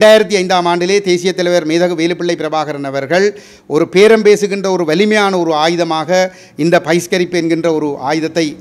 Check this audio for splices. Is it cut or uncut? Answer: uncut